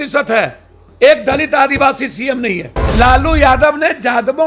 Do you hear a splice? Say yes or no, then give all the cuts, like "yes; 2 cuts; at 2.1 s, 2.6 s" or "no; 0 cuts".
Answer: yes; 1 cut; at 2.9 s